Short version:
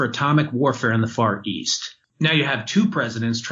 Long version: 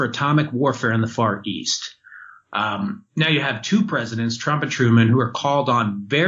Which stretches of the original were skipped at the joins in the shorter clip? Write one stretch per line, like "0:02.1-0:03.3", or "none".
0:02.1-0:03.0